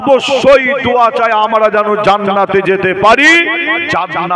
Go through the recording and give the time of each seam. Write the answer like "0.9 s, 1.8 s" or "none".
none